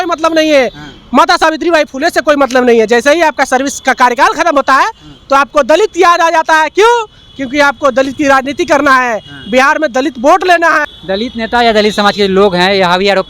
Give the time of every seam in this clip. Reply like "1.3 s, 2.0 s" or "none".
10.9 s